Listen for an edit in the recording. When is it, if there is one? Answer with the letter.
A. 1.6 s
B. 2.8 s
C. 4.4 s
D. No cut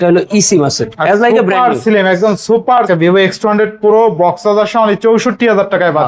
B